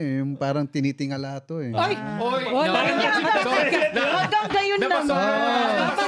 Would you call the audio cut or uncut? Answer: uncut